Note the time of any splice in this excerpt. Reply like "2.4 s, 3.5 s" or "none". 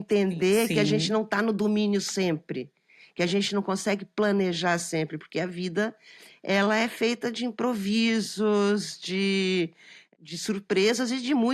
none